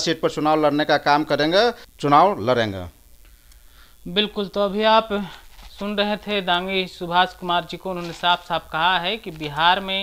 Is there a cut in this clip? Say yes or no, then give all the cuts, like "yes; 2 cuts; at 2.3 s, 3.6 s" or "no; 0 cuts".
no; 0 cuts